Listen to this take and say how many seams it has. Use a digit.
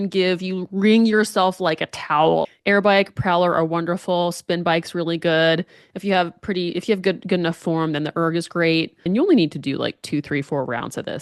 2